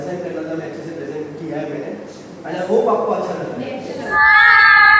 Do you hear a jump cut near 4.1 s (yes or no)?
yes